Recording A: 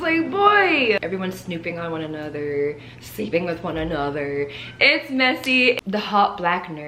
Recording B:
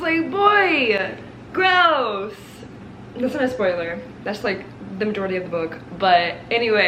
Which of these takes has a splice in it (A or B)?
A